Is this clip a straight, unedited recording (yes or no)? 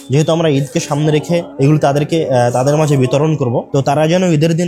no